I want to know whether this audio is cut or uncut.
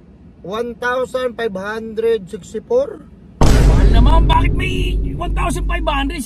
uncut